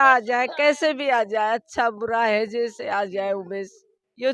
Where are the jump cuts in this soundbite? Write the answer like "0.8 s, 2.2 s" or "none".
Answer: none